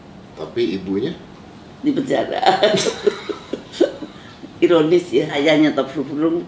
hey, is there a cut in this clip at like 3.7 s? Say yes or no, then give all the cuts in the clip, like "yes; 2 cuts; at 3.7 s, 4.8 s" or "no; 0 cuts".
no; 1 cut; at 5.4 s